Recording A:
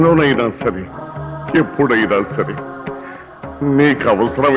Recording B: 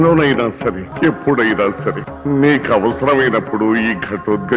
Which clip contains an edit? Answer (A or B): B